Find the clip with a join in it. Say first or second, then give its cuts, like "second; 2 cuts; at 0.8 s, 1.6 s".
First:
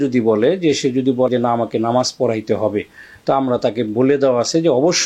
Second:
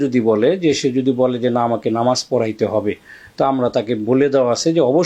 first; 1 cut; at 1.3 s